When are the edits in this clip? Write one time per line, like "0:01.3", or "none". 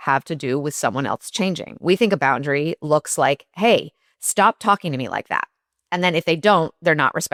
none